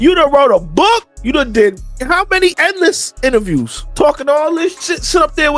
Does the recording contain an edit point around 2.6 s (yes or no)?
yes